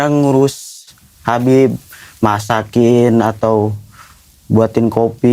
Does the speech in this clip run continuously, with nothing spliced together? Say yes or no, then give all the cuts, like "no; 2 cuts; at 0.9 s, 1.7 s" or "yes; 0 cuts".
yes; 0 cuts